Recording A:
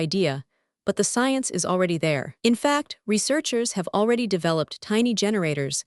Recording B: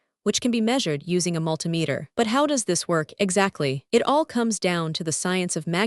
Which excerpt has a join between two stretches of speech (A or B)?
B